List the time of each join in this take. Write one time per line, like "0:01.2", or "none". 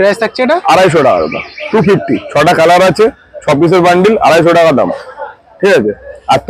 none